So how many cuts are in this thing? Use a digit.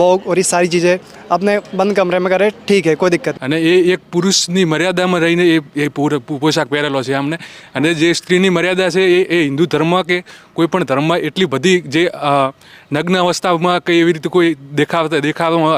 1